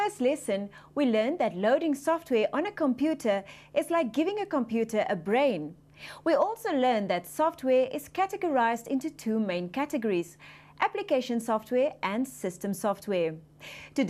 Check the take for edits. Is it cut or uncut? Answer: uncut